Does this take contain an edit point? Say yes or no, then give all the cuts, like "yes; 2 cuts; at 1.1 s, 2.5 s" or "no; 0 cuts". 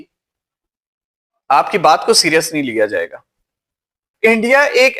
yes; 1 cut; at 4.1 s